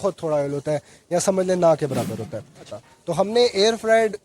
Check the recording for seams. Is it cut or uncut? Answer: cut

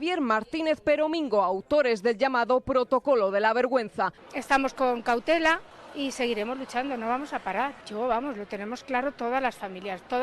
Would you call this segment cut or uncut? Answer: cut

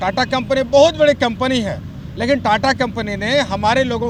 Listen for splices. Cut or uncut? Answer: uncut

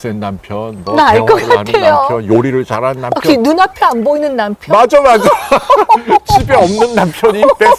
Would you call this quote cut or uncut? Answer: uncut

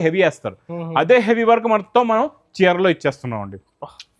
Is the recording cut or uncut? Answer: uncut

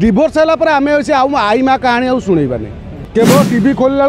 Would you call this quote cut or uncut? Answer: cut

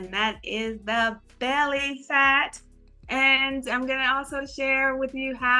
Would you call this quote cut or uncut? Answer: uncut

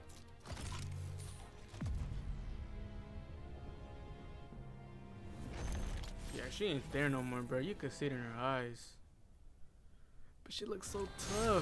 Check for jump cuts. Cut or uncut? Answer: uncut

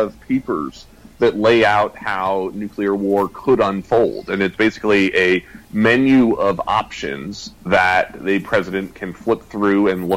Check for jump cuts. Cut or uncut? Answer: uncut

